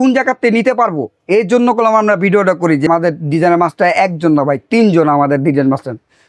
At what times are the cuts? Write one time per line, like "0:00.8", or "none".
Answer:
0:02.9